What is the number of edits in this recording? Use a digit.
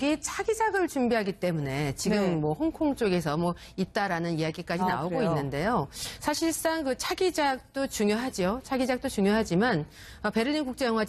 1